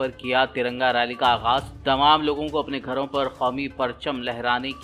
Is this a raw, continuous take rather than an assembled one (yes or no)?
yes